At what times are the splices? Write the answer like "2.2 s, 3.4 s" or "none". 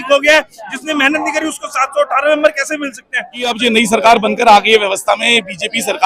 3.4 s